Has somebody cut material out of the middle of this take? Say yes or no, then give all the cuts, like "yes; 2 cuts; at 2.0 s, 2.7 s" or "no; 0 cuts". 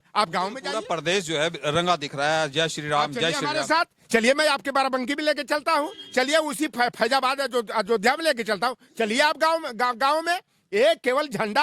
no; 0 cuts